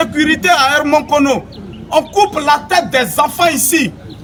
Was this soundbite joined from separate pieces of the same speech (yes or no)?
no